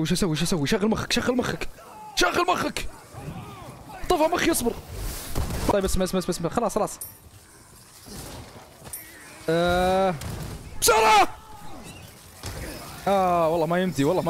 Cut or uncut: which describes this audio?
uncut